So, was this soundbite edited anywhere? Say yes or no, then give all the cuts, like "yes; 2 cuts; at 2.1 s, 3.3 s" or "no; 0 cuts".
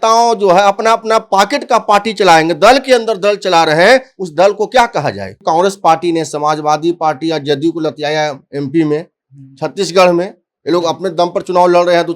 yes; 1 cut; at 5.4 s